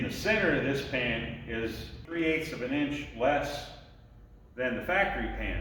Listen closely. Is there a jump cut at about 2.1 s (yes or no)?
yes